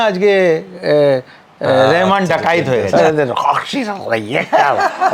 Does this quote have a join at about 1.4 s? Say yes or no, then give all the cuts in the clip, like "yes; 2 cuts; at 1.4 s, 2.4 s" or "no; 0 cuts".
no; 1 cut; at 2.9 s